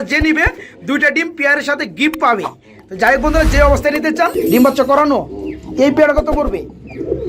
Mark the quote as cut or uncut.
cut